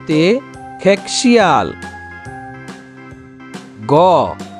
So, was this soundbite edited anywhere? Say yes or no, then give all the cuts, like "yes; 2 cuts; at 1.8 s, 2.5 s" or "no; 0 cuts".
yes; 2 cuts; at 2.3 s, 3.8 s